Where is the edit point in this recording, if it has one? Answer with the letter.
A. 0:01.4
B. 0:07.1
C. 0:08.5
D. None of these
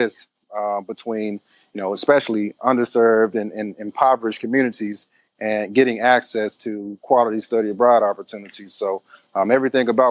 D